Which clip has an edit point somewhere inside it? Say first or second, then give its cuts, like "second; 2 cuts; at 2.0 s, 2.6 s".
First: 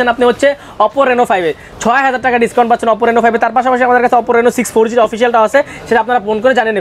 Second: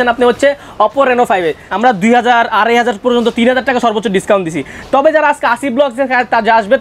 second; 1 cut; at 1.6 s